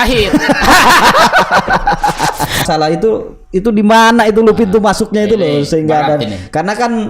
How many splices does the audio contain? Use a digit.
1